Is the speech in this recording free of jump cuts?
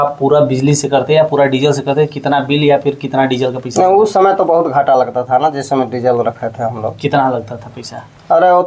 yes; 0 cuts

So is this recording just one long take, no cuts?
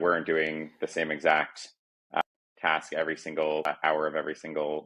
no; 2 cuts; at 2.2 s, 3.7 s

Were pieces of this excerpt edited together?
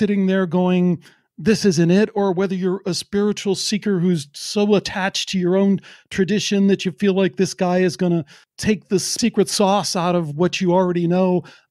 no; 0 cuts

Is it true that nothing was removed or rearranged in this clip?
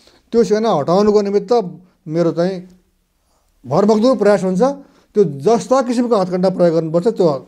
yes; 0 cuts

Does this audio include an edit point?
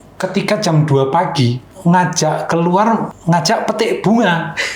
yes; 2 cuts; at 1.7 s, 3.1 s

